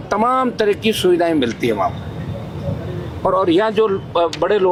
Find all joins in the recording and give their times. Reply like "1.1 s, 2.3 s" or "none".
none

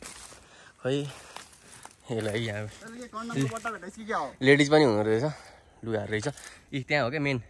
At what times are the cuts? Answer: none

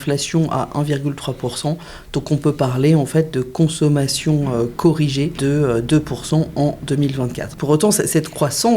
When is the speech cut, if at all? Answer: 5.4 s, 7.5 s

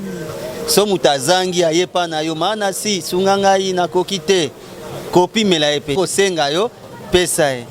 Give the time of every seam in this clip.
5.9 s

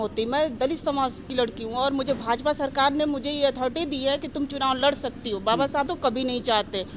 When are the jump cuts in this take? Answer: 5.9 s

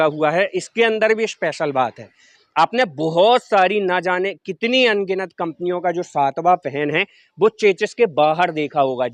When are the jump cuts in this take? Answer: none

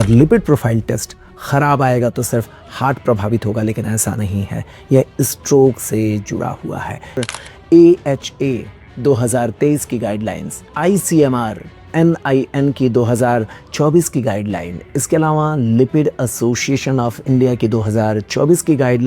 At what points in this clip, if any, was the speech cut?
7.2 s

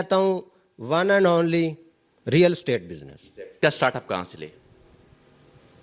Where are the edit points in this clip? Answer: 3.6 s

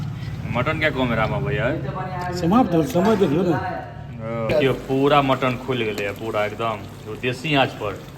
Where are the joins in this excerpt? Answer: 4.5 s

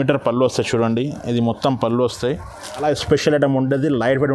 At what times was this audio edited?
2.8 s

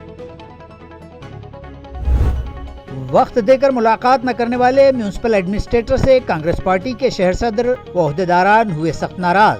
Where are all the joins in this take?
2.5 s

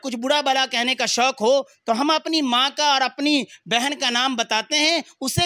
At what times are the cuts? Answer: none

